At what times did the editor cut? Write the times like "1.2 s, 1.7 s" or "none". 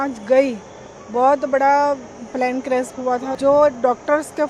3.4 s